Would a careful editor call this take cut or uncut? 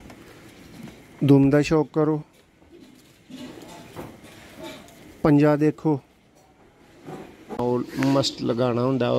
cut